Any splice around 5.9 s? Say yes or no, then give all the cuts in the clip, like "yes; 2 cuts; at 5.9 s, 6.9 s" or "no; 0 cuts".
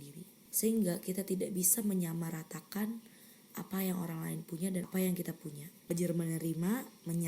yes; 2 cuts; at 4.9 s, 5.9 s